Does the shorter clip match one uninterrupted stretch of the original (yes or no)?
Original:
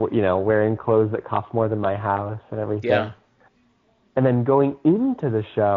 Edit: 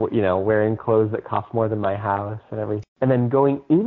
no